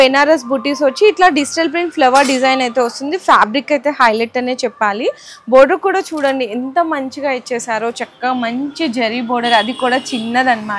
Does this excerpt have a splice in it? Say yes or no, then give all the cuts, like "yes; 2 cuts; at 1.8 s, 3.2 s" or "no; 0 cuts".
no; 0 cuts